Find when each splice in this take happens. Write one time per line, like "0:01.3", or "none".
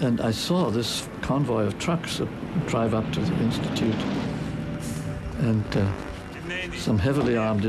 none